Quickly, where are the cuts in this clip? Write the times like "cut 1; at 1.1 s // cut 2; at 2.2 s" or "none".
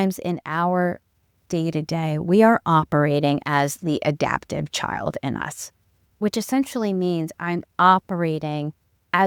none